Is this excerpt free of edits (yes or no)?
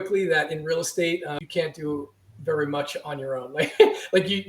no